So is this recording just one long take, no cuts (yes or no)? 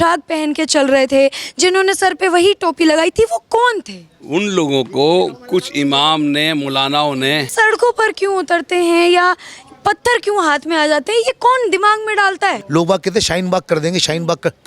no